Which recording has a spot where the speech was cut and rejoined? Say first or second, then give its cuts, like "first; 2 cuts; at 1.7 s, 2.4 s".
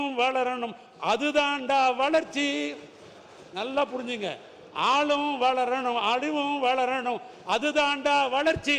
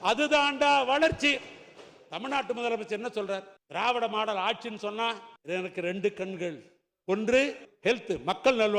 second; 3 cuts; at 3.6 s, 5.3 s, 7.7 s